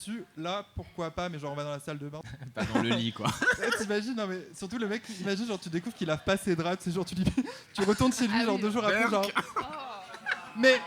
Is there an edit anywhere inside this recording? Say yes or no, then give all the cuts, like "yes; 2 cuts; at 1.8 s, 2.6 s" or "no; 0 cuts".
yes; 1 cut; at 2.2 s